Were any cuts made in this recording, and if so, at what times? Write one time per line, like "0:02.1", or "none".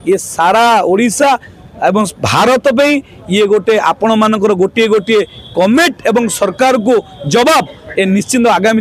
none